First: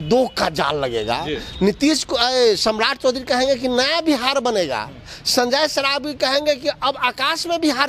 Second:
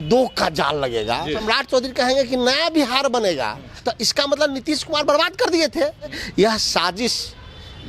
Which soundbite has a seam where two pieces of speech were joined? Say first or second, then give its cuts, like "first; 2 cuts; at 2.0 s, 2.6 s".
second; 3 cuts; at 1.5 s, 3.6 s, 6.2 s